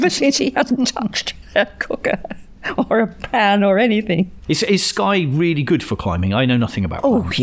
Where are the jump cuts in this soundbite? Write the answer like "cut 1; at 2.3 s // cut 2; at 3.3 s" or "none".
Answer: none